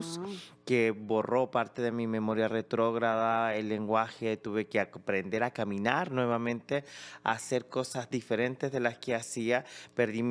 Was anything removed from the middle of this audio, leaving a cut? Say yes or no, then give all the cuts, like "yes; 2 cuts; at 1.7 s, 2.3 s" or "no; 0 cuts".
no; 0 cuts